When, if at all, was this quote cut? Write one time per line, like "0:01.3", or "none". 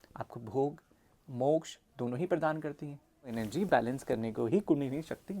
0:03.3